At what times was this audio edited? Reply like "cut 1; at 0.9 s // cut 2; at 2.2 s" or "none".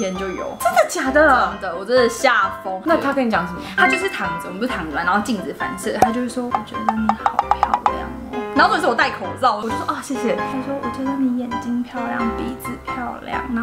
cut 1; at 2.8 s